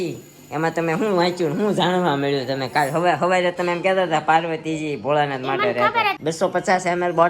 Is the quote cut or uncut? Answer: cut